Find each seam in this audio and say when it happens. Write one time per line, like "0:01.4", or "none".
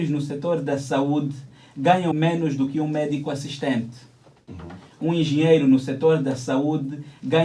0:02.1